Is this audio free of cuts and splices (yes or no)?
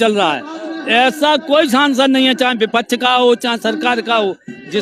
yes